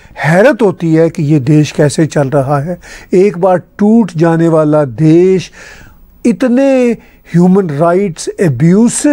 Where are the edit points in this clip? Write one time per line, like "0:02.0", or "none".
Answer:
none

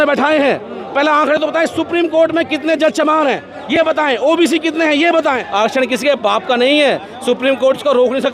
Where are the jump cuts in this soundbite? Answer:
0:05.4

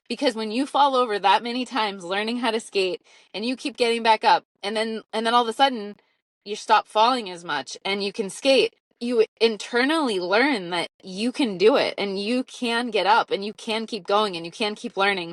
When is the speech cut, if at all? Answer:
0:08.9

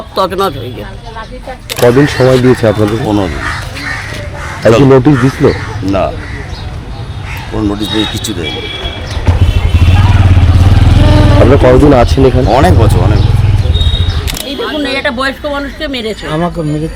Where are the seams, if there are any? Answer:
0:01.7
0:14.4

